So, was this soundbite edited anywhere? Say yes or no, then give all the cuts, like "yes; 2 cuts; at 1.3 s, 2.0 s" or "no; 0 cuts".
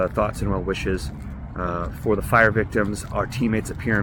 no; 0 cuts